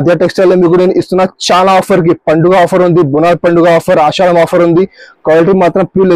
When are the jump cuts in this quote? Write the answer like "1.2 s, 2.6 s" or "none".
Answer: none